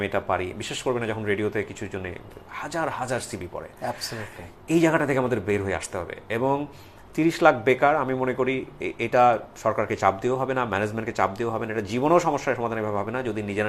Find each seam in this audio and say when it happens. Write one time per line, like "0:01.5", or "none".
none